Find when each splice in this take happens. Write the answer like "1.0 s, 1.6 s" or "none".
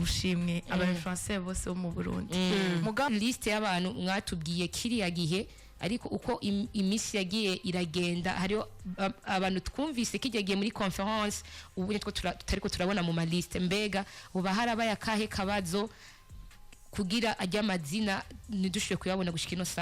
3.1 s